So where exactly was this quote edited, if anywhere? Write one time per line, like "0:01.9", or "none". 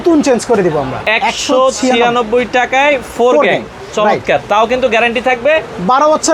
0:01.0